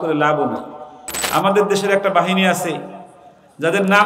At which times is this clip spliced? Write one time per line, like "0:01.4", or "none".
0:01.2